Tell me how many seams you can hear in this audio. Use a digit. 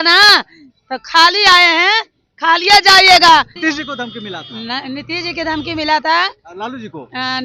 1